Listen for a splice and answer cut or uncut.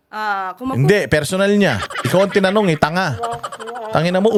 uncut